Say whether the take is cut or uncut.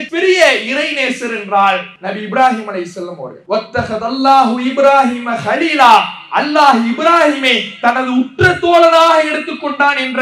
cut